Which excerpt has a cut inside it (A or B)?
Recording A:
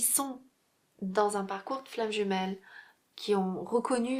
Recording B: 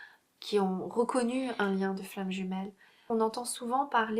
B